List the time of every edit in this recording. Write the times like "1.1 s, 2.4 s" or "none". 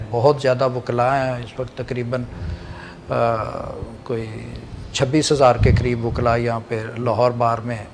none